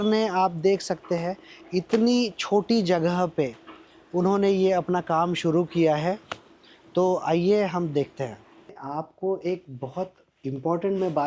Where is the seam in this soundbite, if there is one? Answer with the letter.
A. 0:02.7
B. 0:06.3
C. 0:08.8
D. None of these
C